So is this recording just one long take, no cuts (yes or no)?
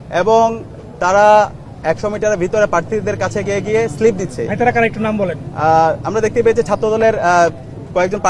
yes